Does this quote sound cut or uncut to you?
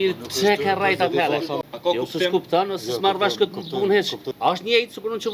cut